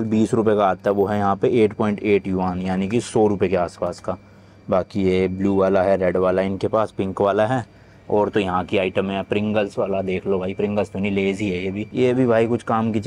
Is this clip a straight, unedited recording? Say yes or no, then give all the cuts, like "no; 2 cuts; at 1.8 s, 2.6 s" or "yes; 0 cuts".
yes; 0 cuts